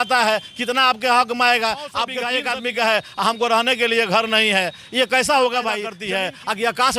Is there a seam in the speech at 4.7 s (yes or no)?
no